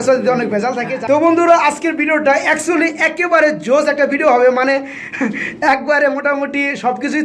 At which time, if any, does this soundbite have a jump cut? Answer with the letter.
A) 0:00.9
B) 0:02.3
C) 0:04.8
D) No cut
A